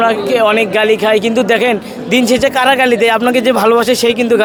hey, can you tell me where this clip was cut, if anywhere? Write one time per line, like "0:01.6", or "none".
none